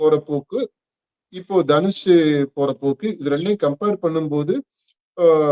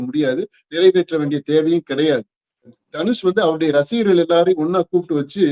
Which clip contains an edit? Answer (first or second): second